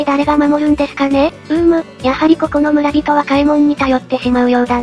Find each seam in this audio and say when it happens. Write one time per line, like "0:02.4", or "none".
0:01.4